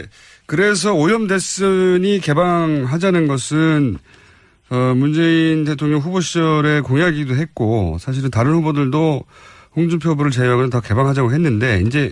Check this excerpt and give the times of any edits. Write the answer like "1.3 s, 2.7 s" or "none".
none